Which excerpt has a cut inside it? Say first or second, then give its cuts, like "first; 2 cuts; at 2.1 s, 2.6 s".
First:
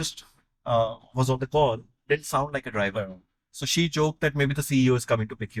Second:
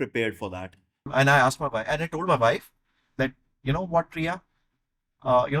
second; 1 cut; at 1.1 s